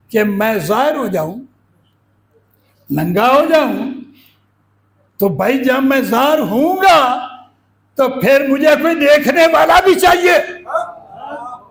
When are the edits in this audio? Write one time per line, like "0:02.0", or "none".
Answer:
none